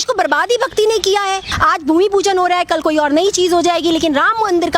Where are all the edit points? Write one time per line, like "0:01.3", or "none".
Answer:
0:01.5